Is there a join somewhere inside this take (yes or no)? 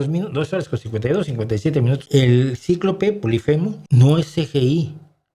yes